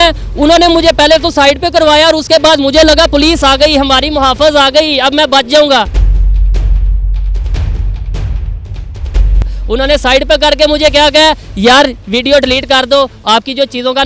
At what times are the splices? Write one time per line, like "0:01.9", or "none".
0:06.0
0:09.5